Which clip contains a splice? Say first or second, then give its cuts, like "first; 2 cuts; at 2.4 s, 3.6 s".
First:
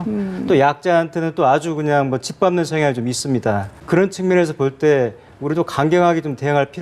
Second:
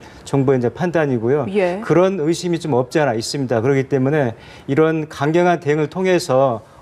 first; 1 cut; at 3.7 s